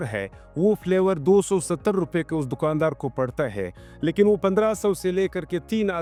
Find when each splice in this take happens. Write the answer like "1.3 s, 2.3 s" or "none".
none